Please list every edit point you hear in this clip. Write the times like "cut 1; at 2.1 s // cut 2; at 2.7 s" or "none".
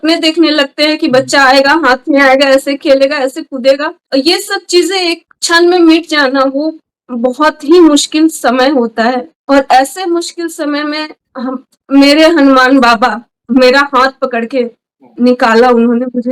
none